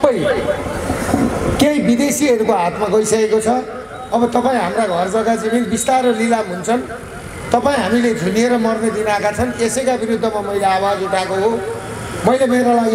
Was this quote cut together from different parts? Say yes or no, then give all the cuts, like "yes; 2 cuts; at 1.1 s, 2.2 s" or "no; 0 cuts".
no; 0 cuts